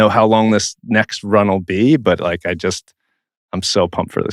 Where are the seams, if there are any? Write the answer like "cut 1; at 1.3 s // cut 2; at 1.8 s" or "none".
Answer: none